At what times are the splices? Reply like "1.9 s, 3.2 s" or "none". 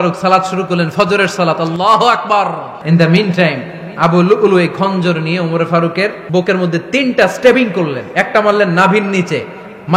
2.8 s, 6.2 s